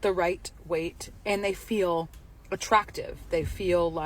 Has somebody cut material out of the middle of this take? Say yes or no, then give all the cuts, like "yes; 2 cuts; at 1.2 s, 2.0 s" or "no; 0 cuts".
yes; 1 cut; at 1.1 s